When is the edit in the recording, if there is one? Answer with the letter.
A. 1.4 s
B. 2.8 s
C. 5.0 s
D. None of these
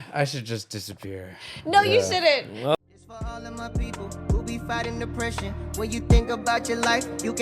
B